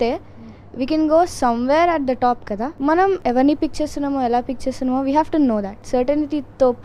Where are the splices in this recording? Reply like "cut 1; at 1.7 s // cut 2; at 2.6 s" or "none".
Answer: cut 1; at 3.2 s // cut 2; at 5.7 s